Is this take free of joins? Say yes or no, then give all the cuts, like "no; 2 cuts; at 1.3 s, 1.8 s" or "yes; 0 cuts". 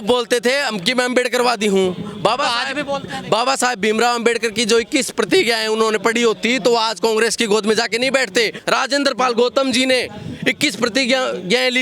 no; 1 cut; at 8.6 s